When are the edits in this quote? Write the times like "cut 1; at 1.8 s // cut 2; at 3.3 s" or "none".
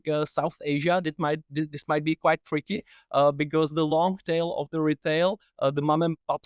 none